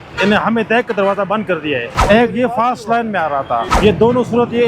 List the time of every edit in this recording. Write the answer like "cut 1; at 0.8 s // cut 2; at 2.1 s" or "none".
cut 1; at 1.9 s // cut 2; at 3.7 s